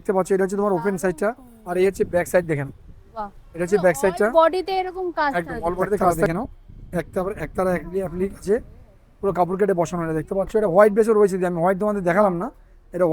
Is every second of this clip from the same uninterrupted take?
no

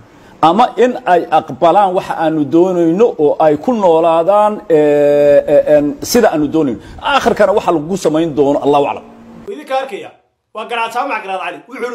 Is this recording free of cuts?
no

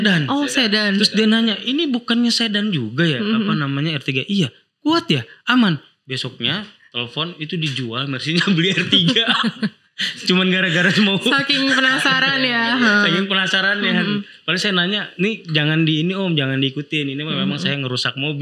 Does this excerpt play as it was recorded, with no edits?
yes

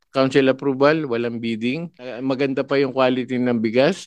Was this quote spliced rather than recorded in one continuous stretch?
yes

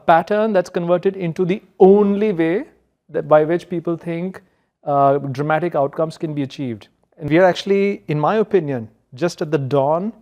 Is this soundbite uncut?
no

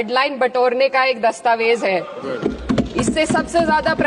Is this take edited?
no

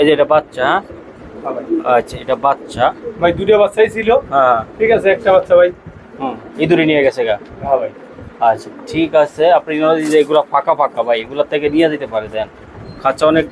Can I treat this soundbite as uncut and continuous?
yes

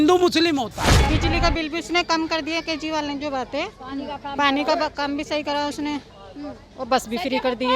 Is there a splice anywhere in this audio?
yes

